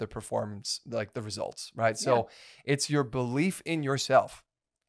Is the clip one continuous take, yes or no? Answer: yes